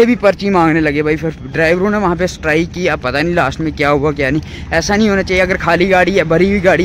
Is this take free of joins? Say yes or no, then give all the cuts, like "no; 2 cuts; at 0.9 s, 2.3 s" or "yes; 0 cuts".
yes; 0 cuts